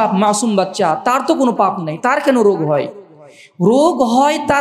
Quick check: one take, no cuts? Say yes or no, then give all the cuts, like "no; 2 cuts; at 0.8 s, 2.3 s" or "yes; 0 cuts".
yes; 0 cuts